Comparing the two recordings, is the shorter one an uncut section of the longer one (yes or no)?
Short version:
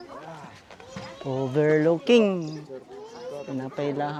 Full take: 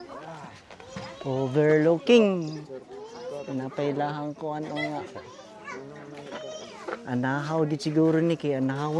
yes